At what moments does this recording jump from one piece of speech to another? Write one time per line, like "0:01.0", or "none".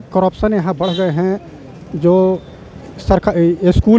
none